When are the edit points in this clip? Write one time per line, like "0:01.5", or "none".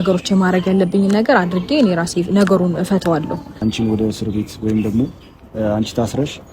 0:03.5